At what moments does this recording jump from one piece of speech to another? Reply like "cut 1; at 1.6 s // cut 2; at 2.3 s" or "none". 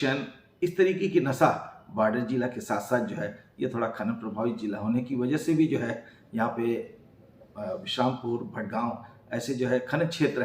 none